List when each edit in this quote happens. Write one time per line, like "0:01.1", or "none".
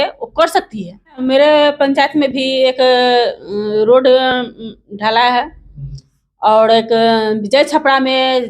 0:01.2